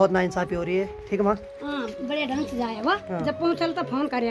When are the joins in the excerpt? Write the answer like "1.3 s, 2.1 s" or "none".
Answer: 1.0 s